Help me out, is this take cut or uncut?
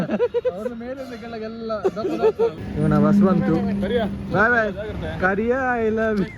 cut